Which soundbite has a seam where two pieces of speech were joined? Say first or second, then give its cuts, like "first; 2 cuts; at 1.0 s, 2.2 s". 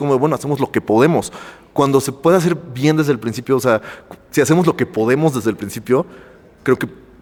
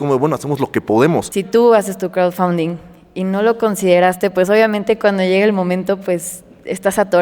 second; 1 cut; at 1.3 s